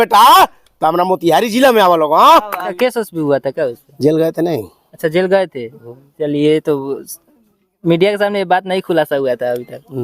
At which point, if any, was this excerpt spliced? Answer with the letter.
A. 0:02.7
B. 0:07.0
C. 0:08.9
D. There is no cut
A